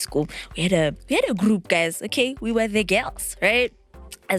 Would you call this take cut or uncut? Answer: uncut